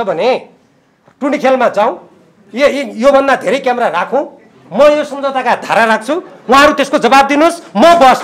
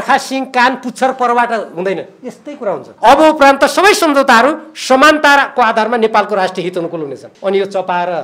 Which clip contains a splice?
second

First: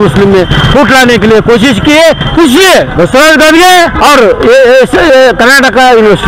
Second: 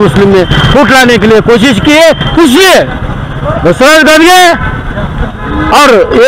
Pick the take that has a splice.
first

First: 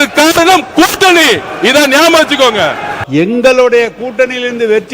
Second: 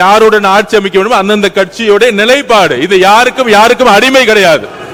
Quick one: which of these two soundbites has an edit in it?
first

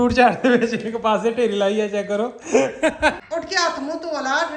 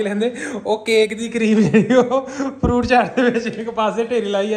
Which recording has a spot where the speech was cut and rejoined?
first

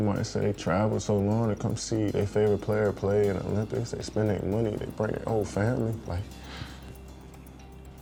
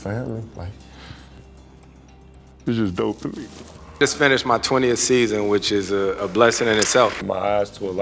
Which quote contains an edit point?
second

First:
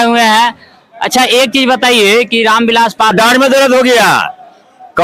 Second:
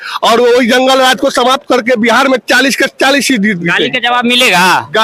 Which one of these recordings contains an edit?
first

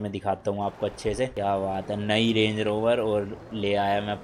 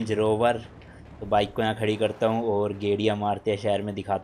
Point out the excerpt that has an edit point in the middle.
first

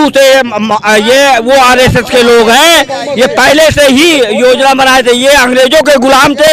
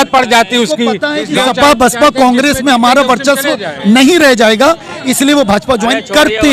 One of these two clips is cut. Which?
second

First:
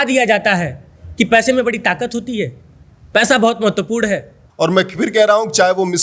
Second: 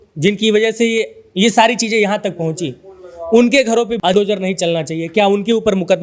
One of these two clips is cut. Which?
first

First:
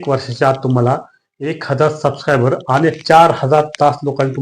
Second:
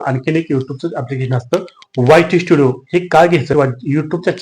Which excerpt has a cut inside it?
second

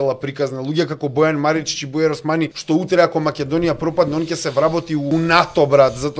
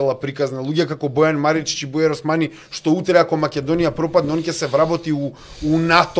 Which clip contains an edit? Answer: first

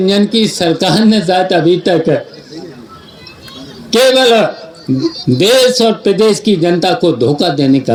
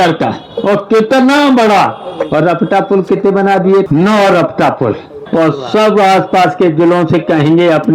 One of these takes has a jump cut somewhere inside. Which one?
second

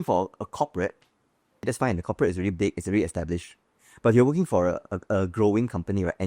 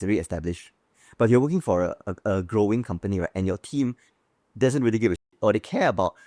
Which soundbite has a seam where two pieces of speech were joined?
first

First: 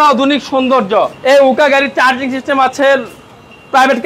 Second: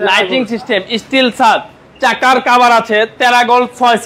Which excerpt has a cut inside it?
first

